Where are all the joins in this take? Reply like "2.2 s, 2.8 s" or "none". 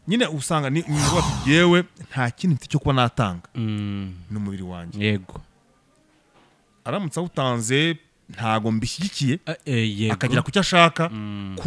none